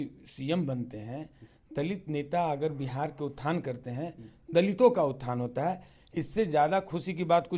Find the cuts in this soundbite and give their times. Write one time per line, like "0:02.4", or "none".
none